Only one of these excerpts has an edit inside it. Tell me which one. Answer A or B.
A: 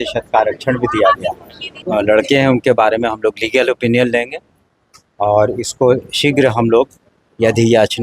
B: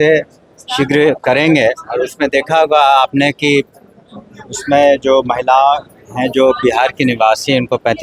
A